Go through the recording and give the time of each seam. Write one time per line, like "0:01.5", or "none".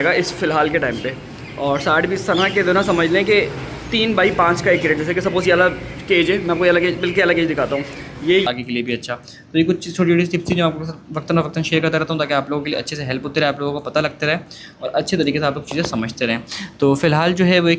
0:08.5